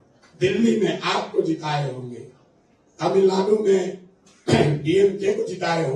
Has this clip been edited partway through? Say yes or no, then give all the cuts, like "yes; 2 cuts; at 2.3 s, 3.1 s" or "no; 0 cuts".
no; 0 cuts